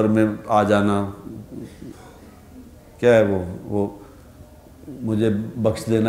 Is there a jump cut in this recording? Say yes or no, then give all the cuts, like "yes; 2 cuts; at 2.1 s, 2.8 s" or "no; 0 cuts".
no; 0 cuts